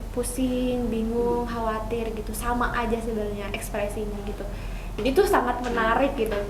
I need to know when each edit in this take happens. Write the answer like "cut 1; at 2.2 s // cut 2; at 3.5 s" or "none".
none